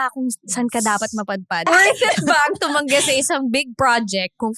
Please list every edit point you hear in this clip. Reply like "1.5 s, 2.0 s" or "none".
1.7 s

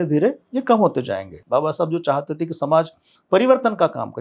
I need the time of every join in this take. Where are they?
1.4 s

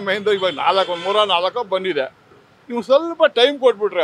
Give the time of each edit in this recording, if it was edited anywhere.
none

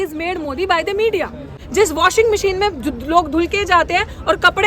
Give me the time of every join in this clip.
1.5 s

